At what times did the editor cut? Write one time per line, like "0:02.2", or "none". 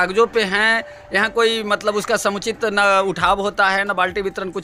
none